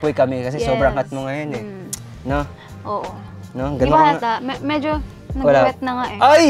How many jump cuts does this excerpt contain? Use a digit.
0